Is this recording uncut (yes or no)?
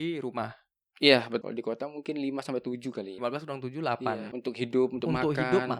no